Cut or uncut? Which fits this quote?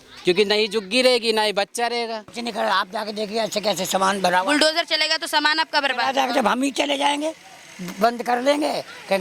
cut